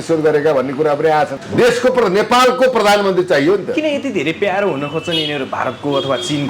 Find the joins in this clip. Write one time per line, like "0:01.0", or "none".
0:01.4